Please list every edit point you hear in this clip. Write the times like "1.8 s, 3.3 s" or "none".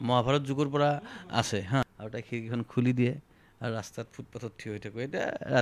1.8 s